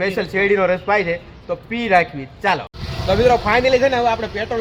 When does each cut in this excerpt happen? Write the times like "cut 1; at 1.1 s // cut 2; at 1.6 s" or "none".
none